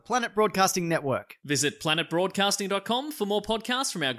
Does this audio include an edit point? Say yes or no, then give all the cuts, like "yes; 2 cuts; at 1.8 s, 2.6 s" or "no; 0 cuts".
no; 0 cuts